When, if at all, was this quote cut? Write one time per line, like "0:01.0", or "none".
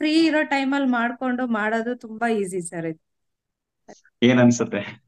0:03.7